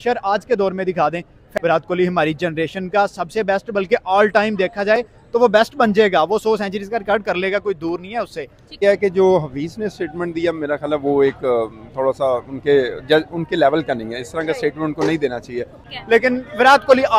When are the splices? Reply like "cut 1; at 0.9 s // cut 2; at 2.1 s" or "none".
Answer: cut 1; at 1.4 s // cut 2; at 8.8 s // cut 3; at 15.8 s